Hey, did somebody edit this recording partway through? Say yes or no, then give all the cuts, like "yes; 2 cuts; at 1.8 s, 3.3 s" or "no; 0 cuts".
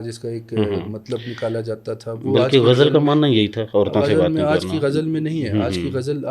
no; 0 cuts